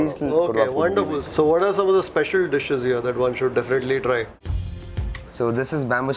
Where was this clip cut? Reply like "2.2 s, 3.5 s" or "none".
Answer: 1.2 s, 4.6 s